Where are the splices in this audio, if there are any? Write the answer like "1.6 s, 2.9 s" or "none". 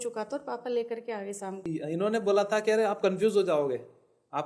1.6 s